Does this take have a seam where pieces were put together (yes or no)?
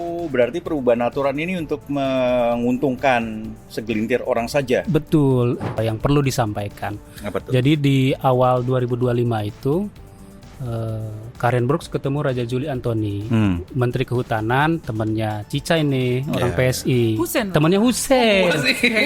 yes